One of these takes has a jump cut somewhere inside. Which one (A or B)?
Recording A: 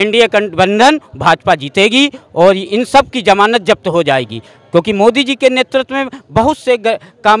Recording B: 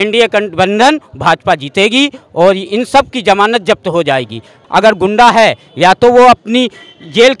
B